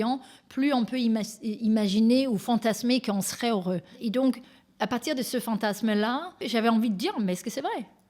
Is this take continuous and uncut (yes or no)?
no